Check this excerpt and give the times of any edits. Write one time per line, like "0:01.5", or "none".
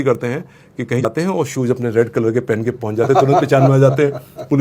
0:01.0